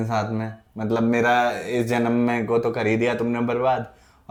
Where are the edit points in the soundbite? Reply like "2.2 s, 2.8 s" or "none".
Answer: none